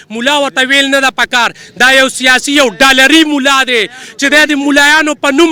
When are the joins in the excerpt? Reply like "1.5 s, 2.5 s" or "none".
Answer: none

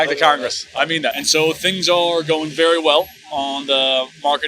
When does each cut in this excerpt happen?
none

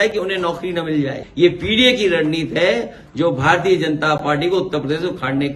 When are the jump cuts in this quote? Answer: 1.2 s

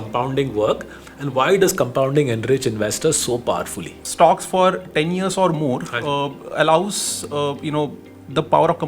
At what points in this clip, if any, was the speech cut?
4.0 s

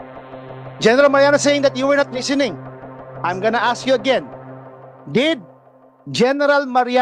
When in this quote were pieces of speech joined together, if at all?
none

